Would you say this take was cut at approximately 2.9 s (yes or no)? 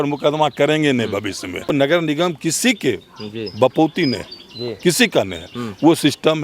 no